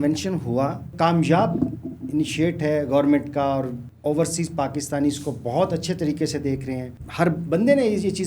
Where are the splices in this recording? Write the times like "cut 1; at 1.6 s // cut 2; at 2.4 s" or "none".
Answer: cut 1; at 0.9 s // cut 2; at 3.8 s // cut 3; at 7.0 s

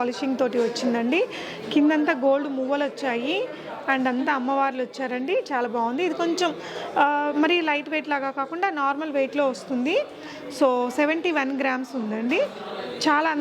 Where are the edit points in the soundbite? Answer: none

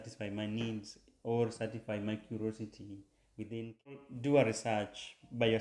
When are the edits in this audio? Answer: cut 1; at 4.0 s

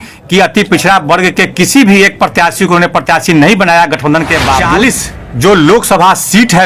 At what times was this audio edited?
cut 1; at 4.7 s

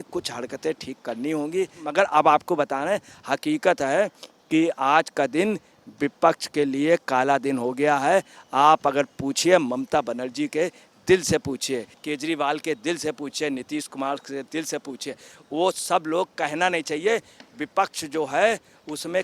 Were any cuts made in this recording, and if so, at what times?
cut 1; at 1.8 s // cut 2; at 12.0 s

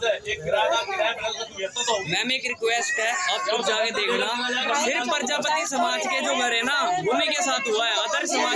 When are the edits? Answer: none

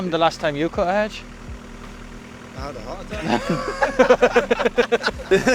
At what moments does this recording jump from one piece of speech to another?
none

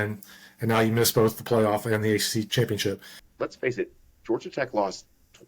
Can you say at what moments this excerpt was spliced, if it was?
cut 1; at 2.5 s // cut 2; at 3.2 s

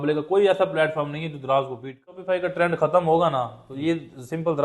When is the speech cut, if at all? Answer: cut 1; at 2.2 s

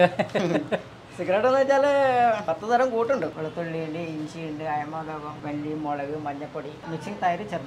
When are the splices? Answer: cut 1; at 3.4 s // cut 2; at 5.4 s // cut 3; at 6.8 s

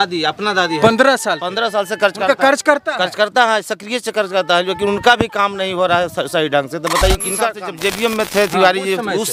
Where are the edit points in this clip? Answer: cut 1; at 7.7 s

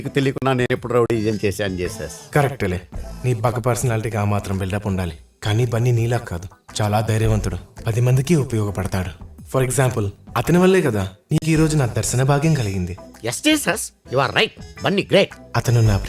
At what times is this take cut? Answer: none

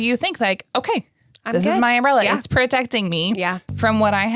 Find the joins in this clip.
none

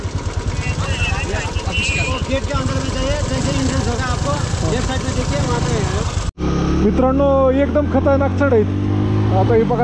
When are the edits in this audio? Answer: cut 1; at 6.2 s

